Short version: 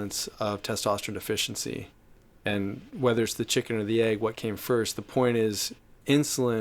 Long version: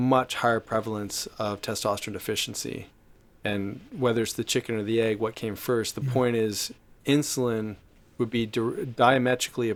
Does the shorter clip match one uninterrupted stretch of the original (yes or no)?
yes